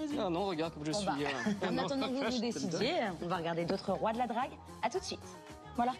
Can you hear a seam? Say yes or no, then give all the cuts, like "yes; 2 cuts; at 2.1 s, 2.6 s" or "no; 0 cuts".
no; 0 cuts